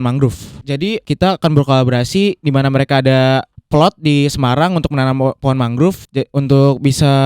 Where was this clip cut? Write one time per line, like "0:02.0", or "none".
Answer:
0:00.8
0:03.6
0:06.0